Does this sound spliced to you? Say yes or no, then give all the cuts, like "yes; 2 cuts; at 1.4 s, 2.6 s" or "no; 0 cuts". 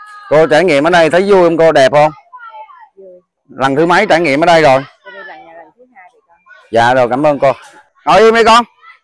yes; 1 cut; at 7.9 s